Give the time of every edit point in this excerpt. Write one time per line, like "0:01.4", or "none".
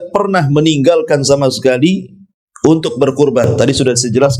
none